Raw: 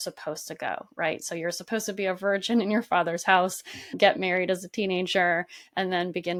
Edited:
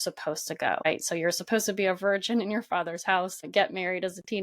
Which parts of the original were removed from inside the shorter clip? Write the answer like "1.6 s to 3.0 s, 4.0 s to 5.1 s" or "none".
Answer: 0.8 s to 1.0 s, 3.6 s to 3.8 s